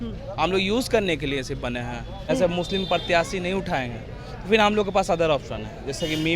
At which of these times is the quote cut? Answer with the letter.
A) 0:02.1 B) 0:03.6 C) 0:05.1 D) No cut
A